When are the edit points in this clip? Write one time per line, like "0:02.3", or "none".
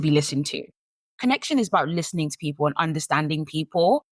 0:01.1